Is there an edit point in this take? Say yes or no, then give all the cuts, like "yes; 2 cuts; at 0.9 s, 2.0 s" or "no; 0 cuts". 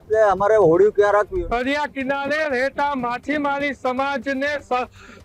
yes; 1 cut; at 1.3 s